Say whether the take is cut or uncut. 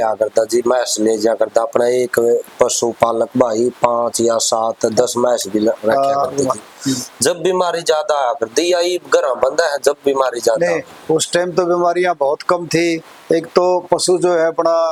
uncut